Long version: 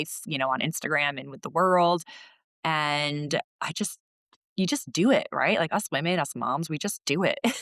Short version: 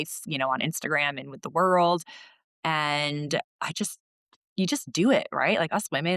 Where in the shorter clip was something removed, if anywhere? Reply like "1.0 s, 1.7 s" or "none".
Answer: none